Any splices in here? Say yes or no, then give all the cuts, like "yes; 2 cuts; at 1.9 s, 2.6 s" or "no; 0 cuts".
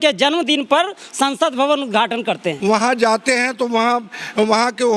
yes; 1 cut; at 2.5 s